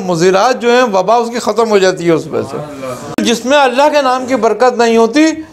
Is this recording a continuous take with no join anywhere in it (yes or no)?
no